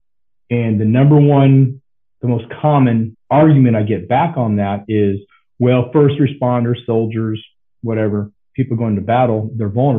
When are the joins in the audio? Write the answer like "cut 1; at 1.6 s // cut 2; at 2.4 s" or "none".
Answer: cut 1; at 3.2 s